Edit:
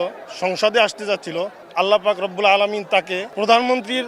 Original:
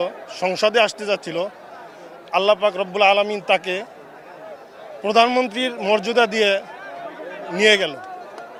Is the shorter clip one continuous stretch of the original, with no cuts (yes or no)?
no